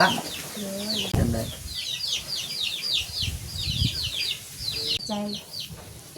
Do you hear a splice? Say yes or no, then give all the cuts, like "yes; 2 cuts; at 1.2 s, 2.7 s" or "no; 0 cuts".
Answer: yes; 2 cuts; at 1.2 s, 5.0 s